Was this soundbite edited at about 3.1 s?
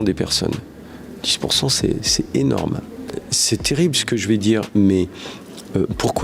yes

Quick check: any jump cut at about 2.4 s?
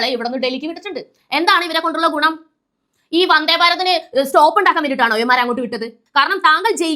no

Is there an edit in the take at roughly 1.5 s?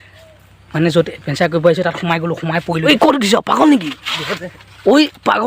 no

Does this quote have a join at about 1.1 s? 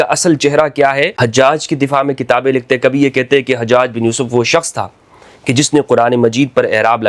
yes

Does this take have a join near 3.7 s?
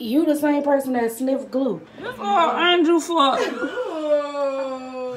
no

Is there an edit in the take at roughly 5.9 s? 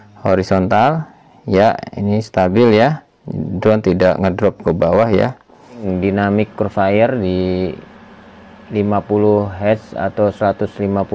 yes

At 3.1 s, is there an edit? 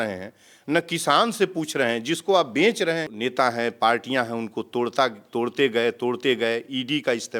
yes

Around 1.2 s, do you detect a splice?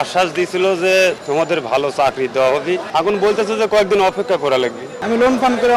yes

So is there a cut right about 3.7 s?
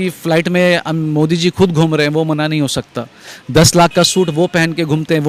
no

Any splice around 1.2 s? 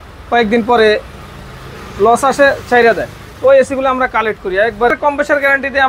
no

